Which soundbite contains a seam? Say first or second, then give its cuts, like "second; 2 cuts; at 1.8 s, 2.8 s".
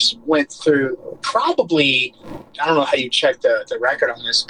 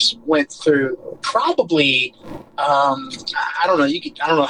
first; 1 cut; at 2.5 s